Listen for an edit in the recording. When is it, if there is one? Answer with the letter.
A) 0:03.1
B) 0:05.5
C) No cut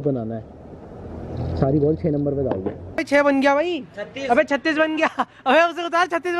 A